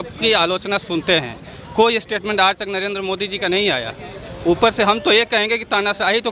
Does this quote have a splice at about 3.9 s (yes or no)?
no